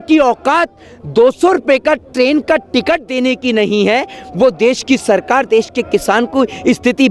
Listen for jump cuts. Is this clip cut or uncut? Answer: uncut